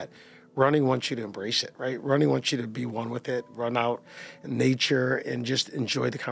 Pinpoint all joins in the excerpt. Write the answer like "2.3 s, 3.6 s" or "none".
none